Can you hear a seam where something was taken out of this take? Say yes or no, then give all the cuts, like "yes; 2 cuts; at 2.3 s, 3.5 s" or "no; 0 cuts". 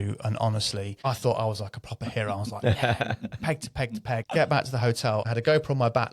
yes; 3 cuts; at 1.0 s, 4.2 s, 5.3 s